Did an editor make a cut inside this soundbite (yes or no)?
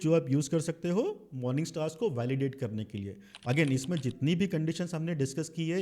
no